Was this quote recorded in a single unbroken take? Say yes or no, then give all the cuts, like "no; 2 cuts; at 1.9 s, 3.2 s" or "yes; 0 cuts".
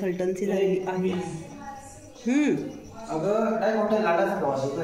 yes; 0 cuts